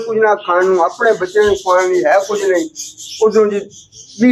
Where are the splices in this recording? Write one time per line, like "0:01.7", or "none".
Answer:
none